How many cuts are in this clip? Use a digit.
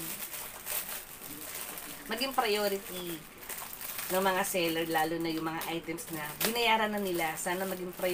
0